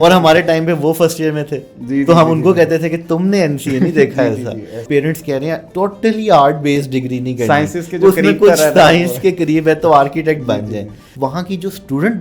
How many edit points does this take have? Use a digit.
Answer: 3